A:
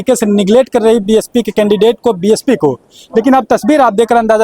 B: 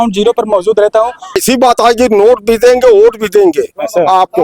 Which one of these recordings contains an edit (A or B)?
B